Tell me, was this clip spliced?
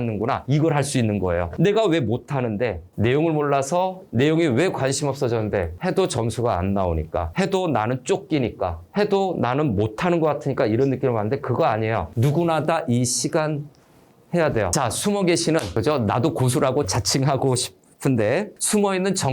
yes; 1 cut; at 14.7 s

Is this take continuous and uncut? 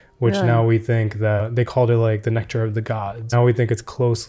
no; 2 cuts; at 1.5 s, 3.3 s

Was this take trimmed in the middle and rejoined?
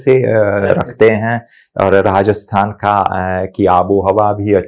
no; 0 cuts

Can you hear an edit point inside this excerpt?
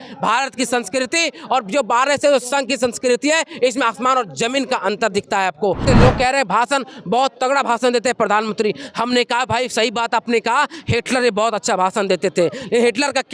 yes; 1 cut; at 5.8 s

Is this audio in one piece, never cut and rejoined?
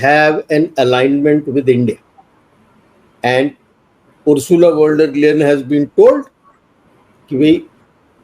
yes; 0 cuts

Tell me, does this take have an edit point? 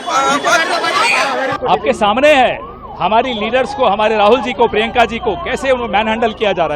yes; 1 cut; at 1.6 s

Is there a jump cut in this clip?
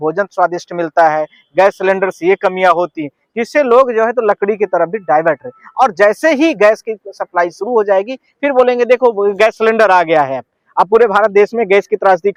no; 0 cuts

